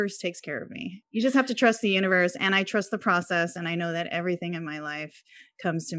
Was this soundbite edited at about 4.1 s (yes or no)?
no